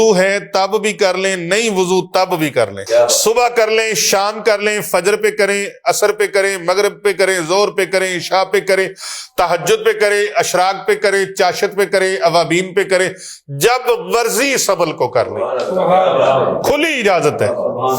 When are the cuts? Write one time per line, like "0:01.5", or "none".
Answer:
0:02.8